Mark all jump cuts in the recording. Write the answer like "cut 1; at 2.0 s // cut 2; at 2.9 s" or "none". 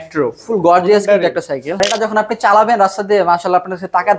cut 1; at 1.7 s